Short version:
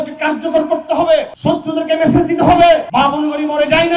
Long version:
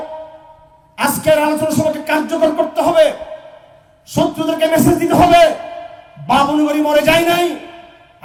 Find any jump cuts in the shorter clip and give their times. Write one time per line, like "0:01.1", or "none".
0:01.3
0:02.9